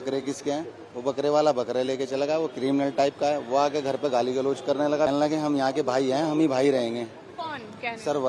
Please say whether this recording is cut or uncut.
cut